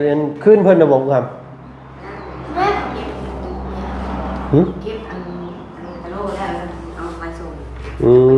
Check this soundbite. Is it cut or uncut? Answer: uncut